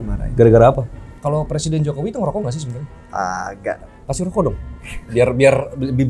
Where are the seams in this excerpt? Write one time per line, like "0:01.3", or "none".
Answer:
0:01.0
0:04.0